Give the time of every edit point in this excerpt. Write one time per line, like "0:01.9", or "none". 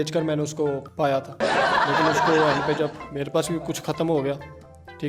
none